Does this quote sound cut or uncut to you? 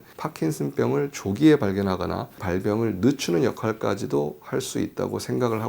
cut